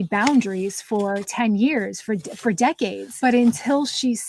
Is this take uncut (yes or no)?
no